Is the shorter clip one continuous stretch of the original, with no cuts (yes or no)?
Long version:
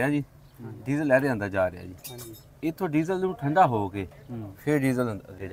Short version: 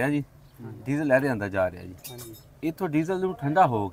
yes